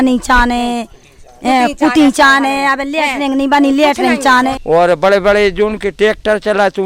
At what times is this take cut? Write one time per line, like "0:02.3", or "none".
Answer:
0:04.6